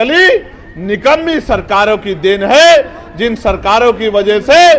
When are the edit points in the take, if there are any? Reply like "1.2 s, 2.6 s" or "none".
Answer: none